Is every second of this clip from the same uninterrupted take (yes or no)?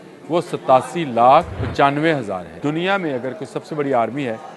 no